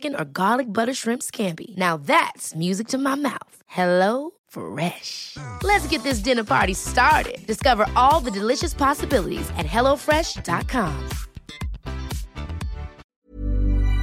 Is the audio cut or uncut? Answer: cut